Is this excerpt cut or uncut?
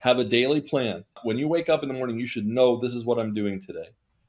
cut